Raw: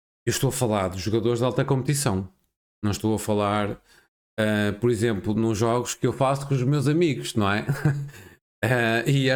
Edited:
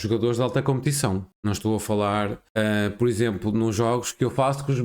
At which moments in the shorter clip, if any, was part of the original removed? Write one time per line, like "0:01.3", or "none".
0:01.3
0:02.4